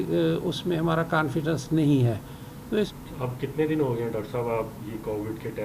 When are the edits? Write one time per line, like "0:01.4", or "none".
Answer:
0:02.9